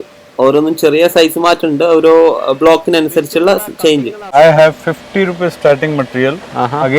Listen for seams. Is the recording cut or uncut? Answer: cut